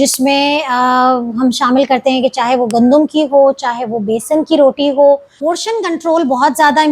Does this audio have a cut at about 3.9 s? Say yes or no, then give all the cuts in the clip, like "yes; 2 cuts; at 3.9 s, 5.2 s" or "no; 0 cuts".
no; 1 cut; at 5.3 s